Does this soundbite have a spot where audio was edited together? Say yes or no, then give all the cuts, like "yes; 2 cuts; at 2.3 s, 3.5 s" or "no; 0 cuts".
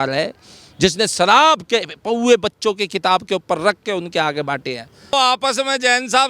yes; 1 cut; at 5.1 s